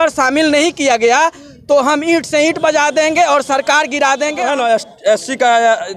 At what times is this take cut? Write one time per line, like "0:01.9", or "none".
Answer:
0:04.4